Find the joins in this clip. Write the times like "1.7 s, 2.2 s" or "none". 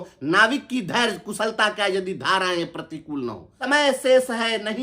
3.5 s